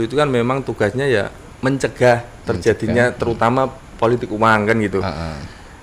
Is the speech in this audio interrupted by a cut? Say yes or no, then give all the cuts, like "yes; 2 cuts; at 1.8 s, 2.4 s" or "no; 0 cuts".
yes; 1 cut; at 1.4 s